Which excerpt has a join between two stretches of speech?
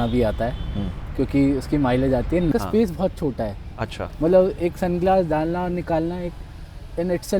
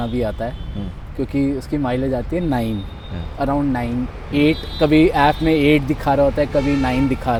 first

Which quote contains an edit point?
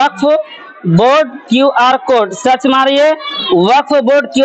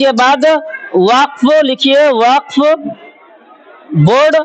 first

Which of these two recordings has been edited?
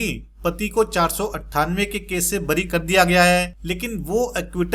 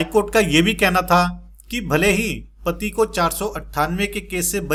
first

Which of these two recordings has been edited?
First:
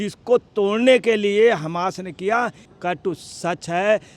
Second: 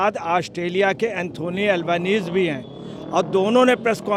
first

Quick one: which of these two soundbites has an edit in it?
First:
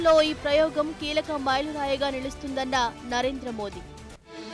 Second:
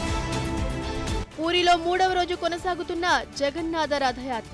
second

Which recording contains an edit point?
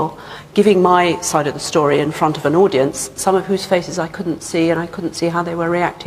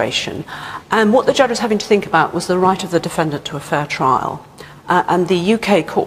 first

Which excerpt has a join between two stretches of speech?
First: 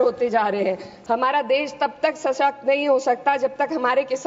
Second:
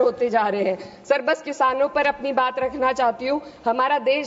first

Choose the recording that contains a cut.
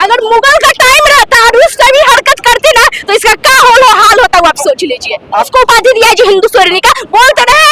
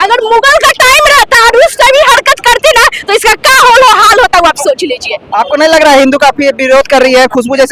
first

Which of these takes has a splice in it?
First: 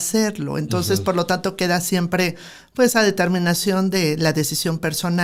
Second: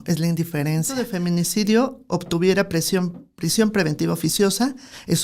second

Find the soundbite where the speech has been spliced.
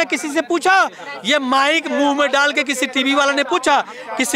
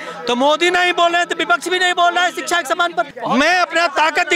second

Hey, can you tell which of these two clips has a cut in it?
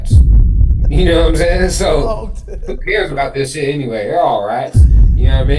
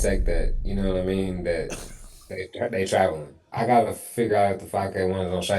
second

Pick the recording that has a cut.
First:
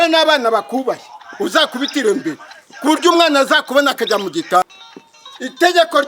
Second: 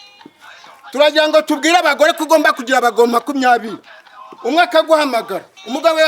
first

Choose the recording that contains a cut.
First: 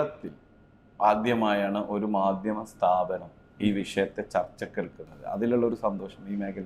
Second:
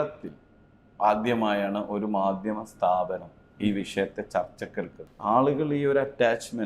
second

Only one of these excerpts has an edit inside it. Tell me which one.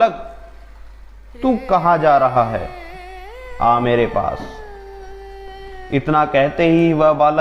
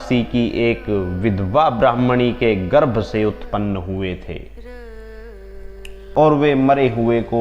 second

